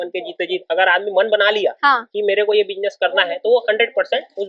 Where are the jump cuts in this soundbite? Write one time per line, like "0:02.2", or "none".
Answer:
none